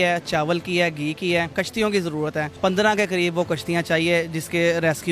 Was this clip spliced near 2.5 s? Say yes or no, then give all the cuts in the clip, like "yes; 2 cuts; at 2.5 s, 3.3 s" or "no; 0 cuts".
yes; 2 cuts; at 1.5 s, 2.5 s